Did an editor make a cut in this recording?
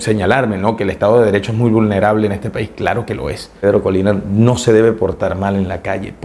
yes; 1 cut; at 3.6 s

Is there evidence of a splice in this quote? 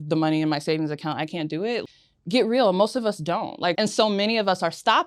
yes; 2 cuts; at 1.8 s, 3.8 s

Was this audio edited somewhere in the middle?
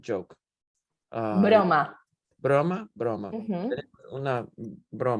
no; 0 cuts

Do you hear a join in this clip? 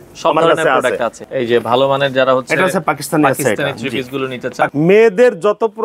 yes; 2 cuts; at 1.2 s, 4.7 s

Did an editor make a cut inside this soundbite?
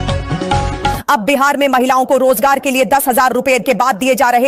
yes; 1 cut; at 1.0 s

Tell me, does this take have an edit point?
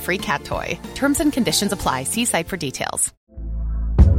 yes; 1 cut; at 3.1 s

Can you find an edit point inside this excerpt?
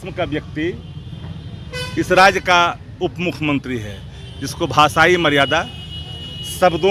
no; 0 cuts

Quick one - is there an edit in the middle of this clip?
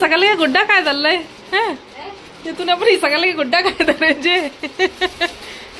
no; 0 cuts

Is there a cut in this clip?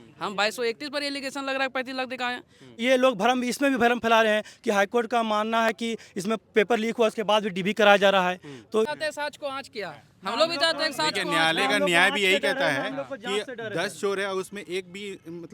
yes; 2 cuts; at 2.8 s, 8.9 s

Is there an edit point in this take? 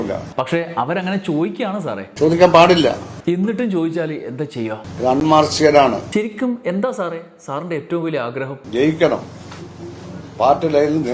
yes; 2 cuts; at 4.8 s, 6.0 s

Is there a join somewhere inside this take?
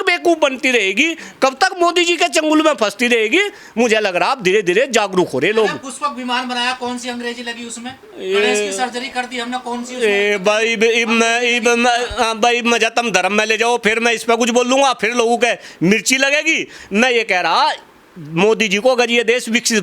no; 0 cuts

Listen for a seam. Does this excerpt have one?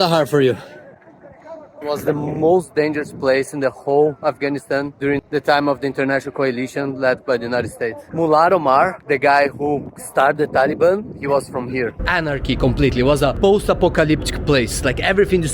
yes; 3 cuts; at 1.7 s, 8.1 s, 12.0 s

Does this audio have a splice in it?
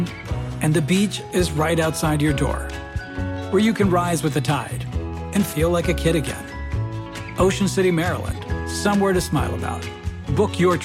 no; 0 cuts

